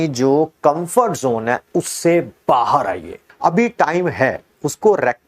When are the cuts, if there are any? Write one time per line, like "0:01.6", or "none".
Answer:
0:03.3